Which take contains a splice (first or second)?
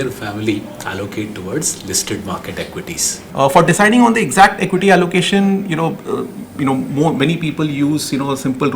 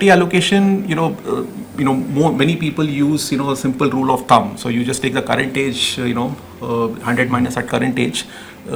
first